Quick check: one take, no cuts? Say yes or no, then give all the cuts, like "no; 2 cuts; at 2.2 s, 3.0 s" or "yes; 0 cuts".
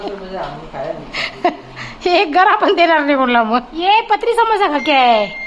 no; 1 cut; at 3.7 s